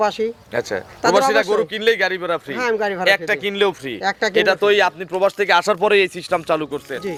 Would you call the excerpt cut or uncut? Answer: uncut